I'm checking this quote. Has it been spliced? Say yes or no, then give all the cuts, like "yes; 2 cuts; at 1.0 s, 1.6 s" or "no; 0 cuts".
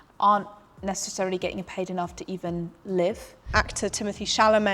yes; 1 cut; at 3.5 s